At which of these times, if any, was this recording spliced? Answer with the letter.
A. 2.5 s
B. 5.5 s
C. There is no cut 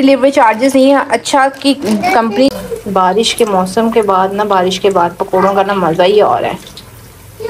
A